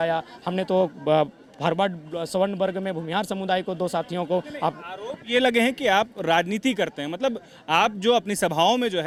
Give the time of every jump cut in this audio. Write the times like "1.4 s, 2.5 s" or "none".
none